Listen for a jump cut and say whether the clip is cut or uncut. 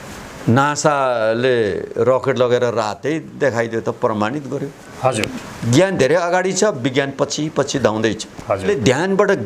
cut